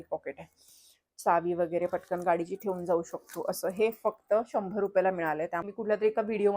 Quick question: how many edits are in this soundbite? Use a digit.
1